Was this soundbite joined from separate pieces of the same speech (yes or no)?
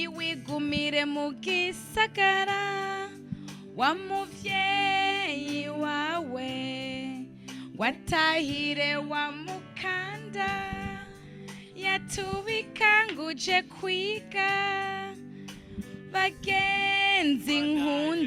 no